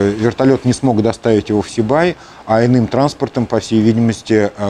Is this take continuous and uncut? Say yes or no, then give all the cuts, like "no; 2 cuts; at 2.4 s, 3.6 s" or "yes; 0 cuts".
yes; 0 cuts